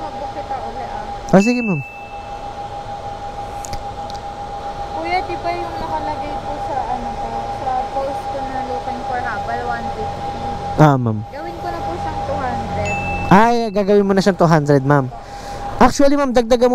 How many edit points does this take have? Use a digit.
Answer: 1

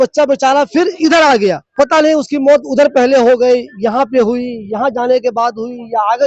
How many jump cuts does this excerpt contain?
1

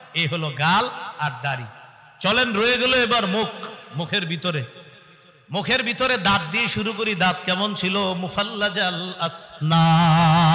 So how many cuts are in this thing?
0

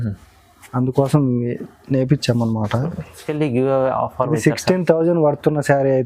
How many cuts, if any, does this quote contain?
1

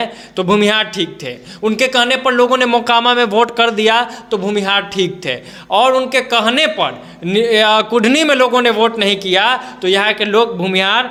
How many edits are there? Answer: 0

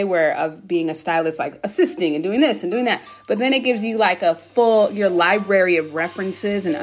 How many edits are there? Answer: 0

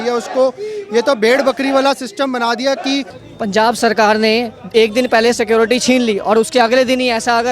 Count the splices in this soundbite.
1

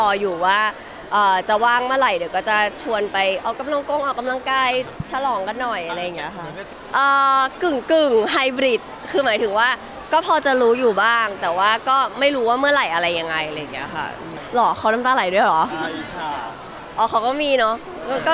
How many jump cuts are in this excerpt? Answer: 2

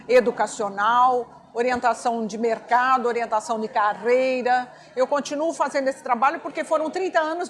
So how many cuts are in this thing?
0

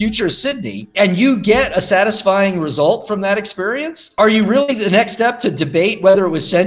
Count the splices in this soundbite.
2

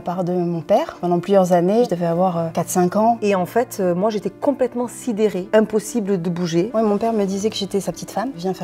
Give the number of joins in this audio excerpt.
3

